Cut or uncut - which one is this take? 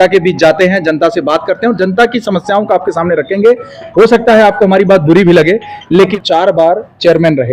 cut